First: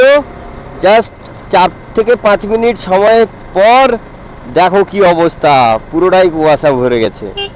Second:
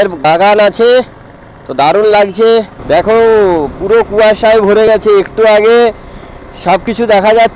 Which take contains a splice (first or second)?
second